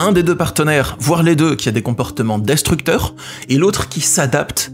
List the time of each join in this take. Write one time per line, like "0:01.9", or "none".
none